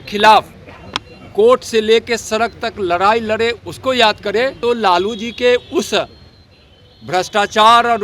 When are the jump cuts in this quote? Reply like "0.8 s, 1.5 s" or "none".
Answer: 4.6 s